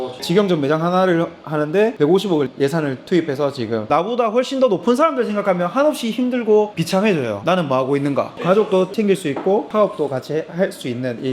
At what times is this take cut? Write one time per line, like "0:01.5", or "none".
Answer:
0:01.9
0:03.7
0:08.4